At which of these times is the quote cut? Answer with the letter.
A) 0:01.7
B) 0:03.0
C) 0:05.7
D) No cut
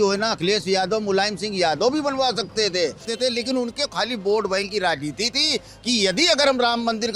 B